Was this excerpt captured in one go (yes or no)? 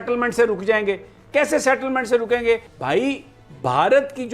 no